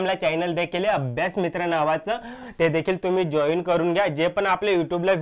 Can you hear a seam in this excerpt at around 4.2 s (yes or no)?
no